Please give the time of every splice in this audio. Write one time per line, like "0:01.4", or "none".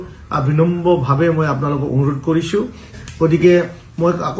0:03.0